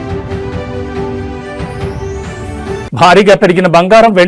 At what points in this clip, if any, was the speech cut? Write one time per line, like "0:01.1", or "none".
none